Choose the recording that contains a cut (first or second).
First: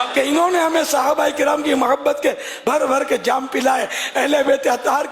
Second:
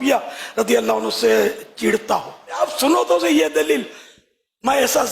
second